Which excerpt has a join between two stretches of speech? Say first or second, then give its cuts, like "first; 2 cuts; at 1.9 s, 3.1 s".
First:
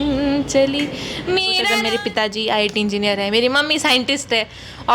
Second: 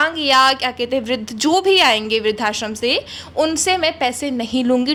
first; 1 cut; at 1.6 s